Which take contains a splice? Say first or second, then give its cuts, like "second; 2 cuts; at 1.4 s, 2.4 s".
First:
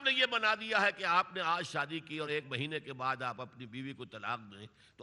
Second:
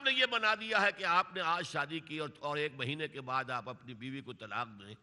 first; 1 cut; at 2.3 s